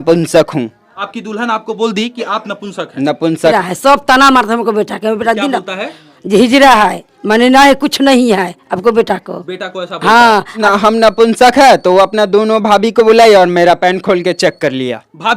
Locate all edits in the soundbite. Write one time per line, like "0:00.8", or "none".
0:01.0
0:03.5
0:10.5